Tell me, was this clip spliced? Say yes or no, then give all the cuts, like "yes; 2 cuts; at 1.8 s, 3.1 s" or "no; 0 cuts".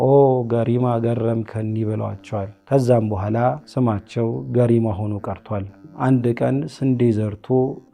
yes; 3 cuts; at 2.6 s, 3.6 s, 5.9 s